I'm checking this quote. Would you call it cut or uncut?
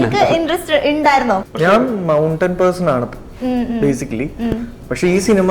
cut